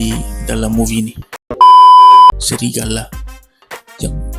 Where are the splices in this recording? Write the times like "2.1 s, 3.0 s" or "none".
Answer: 1.4 s, 2.4 s